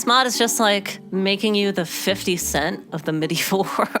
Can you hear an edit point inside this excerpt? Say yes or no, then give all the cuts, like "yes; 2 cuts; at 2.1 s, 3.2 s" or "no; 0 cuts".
yes; 1 cut; at 1.0 s